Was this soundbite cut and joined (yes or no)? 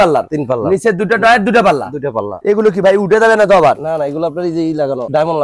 yes